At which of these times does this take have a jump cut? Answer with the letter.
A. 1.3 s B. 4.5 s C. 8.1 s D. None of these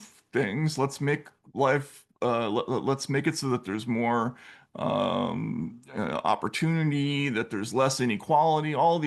D